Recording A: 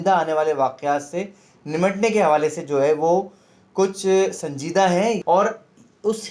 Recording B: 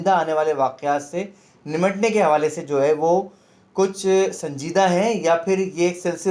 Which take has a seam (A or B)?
A